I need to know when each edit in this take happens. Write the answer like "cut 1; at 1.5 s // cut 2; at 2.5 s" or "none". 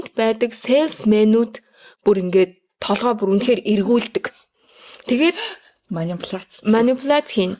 none